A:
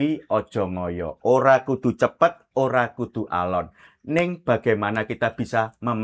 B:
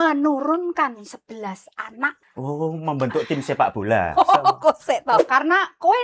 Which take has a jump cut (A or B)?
B